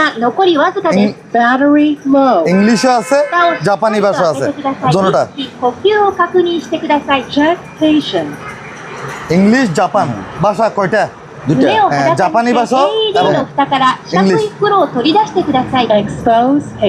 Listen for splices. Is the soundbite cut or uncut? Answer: uncut